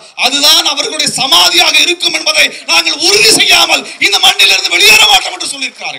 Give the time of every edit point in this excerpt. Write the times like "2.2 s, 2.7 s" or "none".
none